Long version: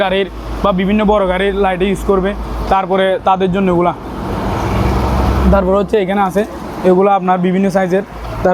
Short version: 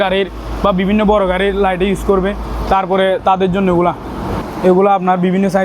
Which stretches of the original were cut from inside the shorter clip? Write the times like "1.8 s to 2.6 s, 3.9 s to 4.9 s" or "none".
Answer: 4.4 s to 6.6 s